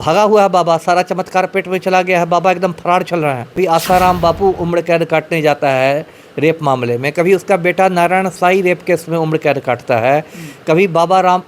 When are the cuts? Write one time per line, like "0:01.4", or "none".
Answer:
0:03.6